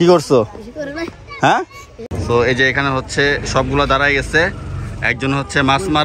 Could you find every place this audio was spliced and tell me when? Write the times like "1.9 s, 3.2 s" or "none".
2.1 s